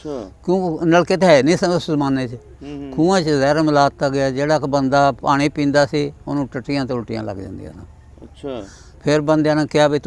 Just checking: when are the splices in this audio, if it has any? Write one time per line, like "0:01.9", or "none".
none